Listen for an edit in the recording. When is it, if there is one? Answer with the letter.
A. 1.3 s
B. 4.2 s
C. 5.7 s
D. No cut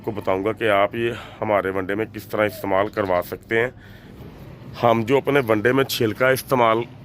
B